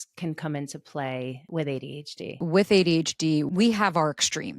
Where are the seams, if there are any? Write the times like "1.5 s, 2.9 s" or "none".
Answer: 1.4 s, 2.3 s, 3.5 s

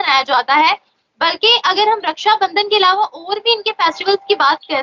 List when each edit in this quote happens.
none

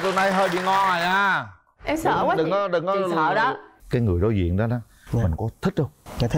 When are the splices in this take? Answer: 3.7 s

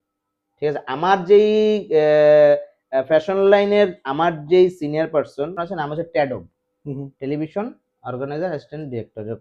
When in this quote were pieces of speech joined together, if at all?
5.6 s

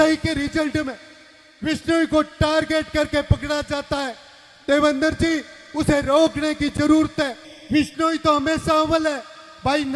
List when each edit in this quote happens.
none

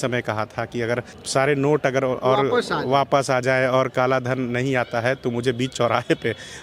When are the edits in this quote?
1.2 s

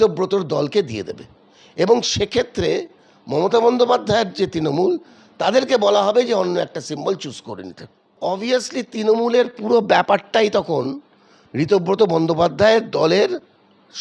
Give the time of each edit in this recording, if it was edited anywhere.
8.2 s

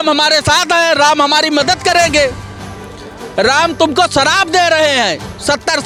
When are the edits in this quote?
none

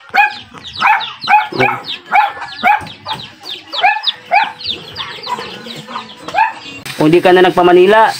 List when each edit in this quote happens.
6.8 s

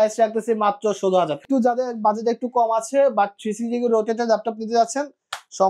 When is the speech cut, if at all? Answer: 1.4 s

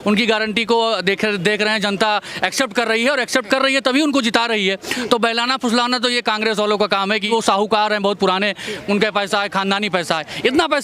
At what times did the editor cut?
7.2 s

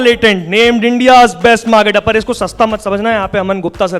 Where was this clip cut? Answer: none

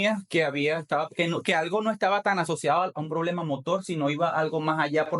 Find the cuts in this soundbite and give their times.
none

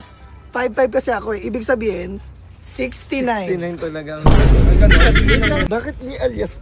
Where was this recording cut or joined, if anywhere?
5.7 s

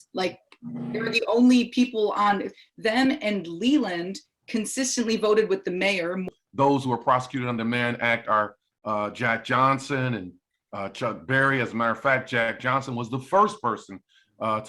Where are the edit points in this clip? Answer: 6.3 s

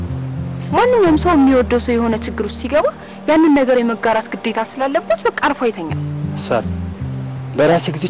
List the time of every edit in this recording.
6.2 s

